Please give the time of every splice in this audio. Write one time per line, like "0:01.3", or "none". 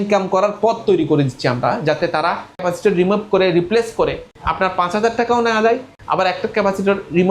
0:02.6